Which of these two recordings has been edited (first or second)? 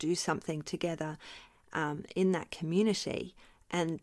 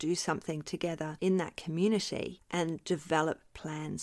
second